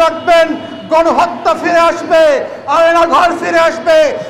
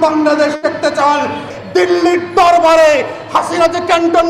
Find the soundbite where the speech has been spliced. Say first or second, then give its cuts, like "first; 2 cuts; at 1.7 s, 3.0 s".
second; 1 cut; at 1.5 s